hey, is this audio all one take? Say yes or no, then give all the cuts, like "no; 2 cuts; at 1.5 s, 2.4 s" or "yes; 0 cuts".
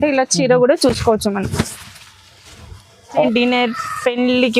no; 1 cut; at 3.2 s